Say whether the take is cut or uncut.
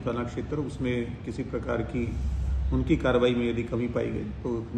uncut